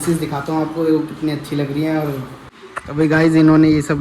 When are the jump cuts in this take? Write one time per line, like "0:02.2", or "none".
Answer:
0:02.8